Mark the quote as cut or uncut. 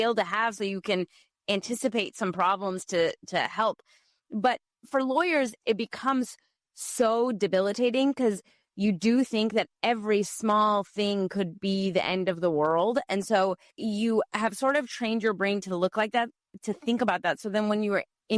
uncut